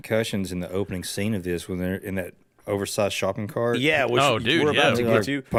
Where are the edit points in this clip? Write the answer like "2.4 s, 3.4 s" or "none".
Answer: none